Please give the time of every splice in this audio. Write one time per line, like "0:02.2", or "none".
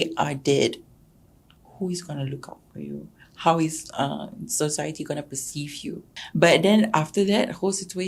0:06.1